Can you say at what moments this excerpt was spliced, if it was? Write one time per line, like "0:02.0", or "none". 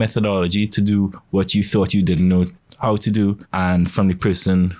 0:03.5